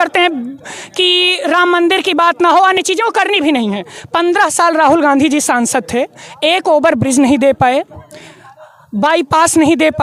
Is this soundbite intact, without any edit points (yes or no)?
yes